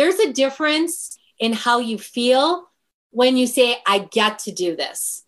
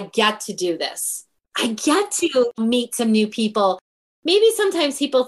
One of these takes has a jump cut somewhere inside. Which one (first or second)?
second